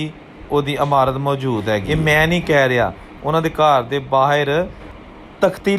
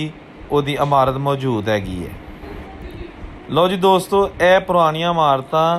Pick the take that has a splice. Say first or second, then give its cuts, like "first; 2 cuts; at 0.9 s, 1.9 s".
first; 1 cut; at 1.8 s